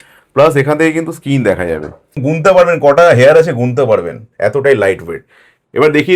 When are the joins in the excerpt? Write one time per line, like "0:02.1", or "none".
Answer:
0:02.2